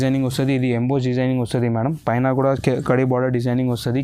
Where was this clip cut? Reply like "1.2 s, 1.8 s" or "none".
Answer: none